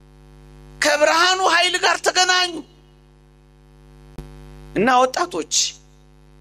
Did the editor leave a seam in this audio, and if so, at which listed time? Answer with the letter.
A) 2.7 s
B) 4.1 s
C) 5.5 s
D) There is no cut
B